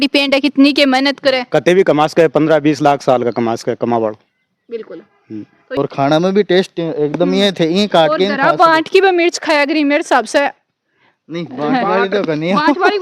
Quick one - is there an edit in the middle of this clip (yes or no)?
yes